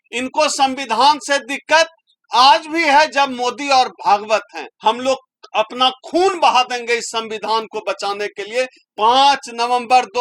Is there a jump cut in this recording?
yes; 2 cuts; at 4.7 s, 8.8 s

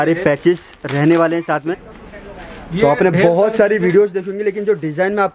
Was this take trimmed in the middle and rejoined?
yes; 1 cut; at 1.9 s

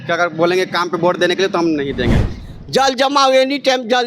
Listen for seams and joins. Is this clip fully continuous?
no; 1 cut; at 2.4 s

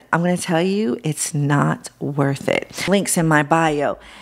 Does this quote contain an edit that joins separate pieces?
yes; 1 cut; at 2.8 s

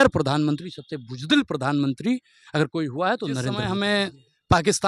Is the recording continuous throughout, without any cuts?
no; 1 cut; at 3.6 s

